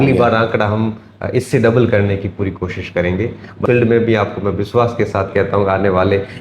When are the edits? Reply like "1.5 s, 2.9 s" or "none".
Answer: 3.6 s